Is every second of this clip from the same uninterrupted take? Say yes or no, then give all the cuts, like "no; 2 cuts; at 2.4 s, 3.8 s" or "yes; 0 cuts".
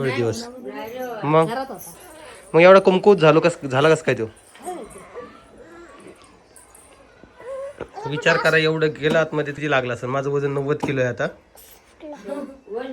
no; 1 cut; at 9.6 s